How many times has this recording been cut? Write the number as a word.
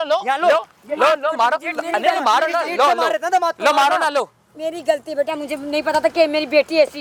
zero